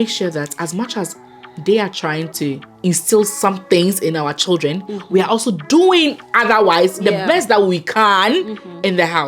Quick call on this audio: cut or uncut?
uncut